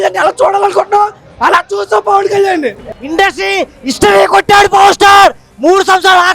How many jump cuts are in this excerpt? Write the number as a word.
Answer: one